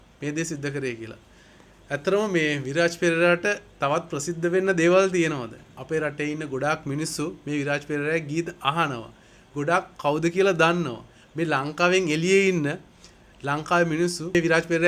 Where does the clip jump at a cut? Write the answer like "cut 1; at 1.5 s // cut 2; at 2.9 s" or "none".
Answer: none